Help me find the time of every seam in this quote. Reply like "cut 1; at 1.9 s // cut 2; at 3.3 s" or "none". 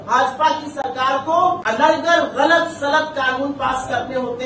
cut 1; at 1.6 s

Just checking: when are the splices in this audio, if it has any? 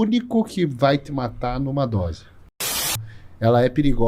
cut 1; at 2.9 s

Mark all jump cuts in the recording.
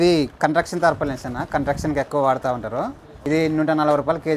none

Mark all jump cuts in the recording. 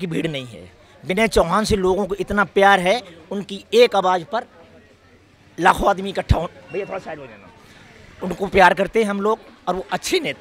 none

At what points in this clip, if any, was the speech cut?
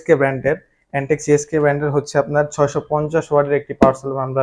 none

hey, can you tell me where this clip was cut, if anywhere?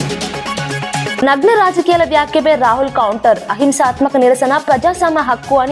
none

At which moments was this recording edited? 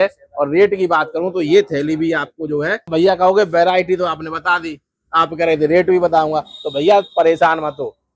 cut 1; at 2.9 s

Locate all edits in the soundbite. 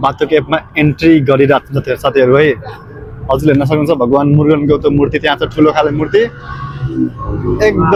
none

